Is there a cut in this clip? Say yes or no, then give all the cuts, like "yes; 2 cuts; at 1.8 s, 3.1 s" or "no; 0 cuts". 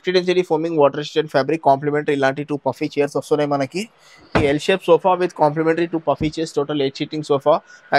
no; 0 cuts